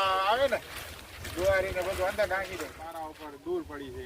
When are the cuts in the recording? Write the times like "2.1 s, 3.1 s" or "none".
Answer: 2.8 s